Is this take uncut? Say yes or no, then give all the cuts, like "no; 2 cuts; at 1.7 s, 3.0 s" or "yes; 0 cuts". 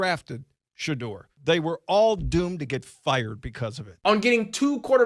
no; 2 cuts; at 1.3 s, 3.9 s